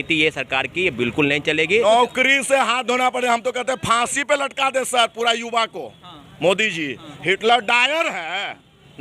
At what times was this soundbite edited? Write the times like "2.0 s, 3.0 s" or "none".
1.8 s